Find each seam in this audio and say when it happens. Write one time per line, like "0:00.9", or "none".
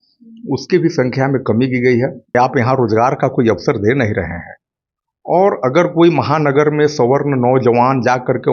0:02.3